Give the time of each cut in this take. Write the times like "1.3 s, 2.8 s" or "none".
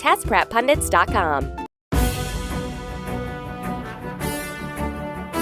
1.7 s